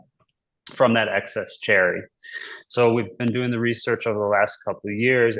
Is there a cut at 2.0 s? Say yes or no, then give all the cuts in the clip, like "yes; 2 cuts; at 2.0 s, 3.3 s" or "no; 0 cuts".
no; 0 cuts